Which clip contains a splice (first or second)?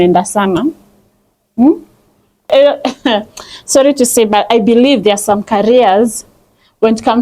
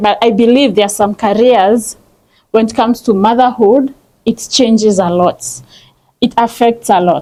first